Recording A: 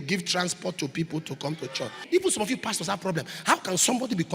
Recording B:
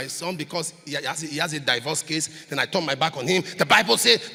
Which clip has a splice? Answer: A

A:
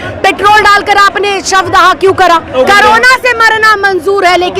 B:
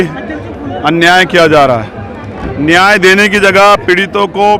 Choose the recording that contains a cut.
A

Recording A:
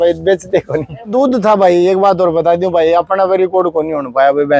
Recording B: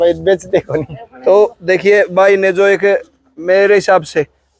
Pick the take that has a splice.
A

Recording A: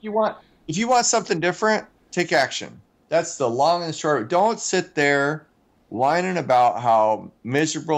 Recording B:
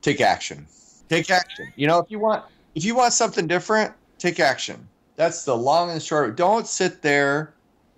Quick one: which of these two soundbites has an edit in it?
B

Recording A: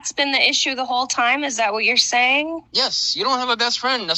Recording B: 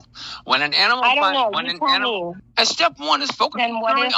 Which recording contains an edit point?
B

